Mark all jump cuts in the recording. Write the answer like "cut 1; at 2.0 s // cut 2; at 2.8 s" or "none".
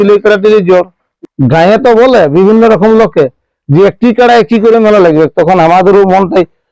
cut 1; at 1.0 s